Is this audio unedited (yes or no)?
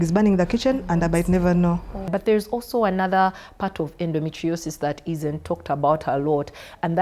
no